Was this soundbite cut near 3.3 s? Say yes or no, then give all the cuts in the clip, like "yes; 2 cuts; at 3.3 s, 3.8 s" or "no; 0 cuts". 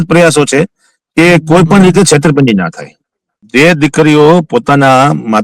yes; 1 cut; at 3.3 s